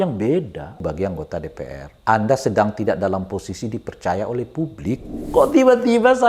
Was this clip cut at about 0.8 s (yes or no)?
yes